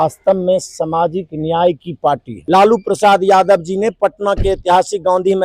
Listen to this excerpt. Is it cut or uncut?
cut